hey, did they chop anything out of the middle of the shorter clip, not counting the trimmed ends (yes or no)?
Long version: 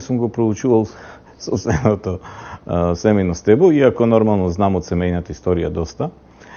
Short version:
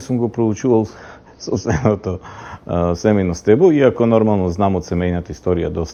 no